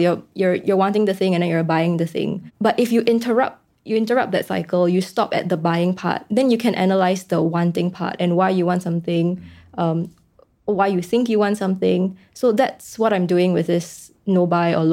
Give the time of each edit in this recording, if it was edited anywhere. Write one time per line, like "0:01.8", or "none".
none